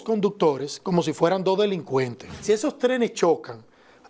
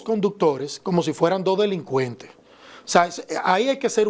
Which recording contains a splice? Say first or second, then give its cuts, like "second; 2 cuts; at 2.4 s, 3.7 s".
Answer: first; 1 cut; at 2.4 s